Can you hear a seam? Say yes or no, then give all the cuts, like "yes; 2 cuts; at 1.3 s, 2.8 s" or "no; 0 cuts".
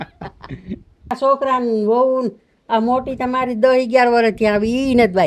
yes; 1 cut; at 1.1 s